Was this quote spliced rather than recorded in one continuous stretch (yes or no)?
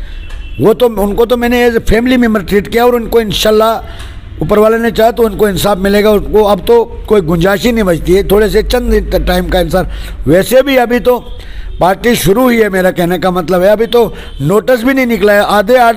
no